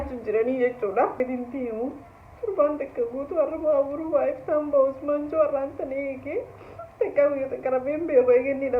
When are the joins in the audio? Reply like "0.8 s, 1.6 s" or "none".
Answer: 1.2 s